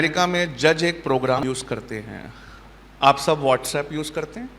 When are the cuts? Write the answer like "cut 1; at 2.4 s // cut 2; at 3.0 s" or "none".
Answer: cut 1; at 1.4 s

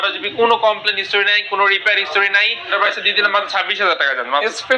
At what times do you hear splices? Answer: cut 1; at 2.7 s

